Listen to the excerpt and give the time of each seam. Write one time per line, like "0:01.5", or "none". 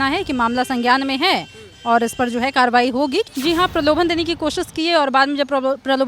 0:03.3